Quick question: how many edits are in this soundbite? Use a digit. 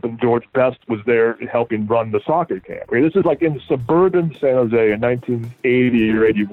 0